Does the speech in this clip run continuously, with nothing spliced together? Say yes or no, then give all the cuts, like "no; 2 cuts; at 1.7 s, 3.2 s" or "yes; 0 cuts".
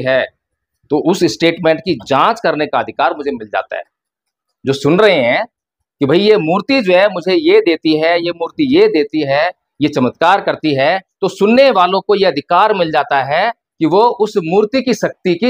yes; 0 cuts